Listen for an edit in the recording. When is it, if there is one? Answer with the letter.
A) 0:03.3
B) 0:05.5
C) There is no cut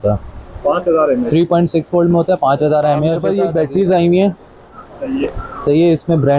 A